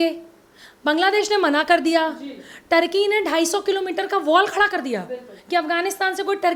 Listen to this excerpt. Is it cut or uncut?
uncut